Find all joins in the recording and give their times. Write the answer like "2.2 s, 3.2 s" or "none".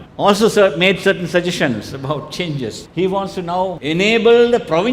2.8 s, 3.8 s